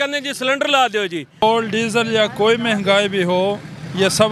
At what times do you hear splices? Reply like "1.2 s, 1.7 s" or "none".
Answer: 1.4 s